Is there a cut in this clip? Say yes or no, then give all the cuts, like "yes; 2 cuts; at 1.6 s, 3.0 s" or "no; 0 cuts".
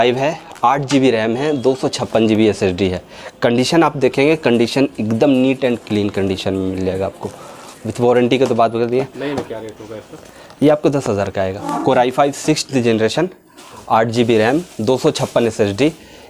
yes; 1 cut; at 11.6 s